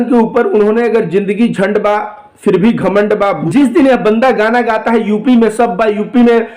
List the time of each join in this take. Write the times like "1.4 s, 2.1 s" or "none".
3.4 s